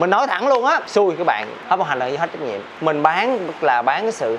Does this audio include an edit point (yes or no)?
yes